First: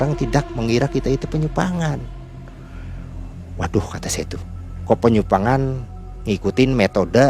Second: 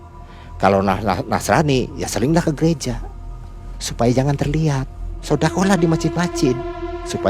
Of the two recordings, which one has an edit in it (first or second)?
second